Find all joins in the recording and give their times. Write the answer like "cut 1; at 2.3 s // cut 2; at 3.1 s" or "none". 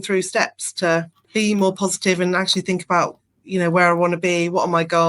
cut 1; at 1.2 s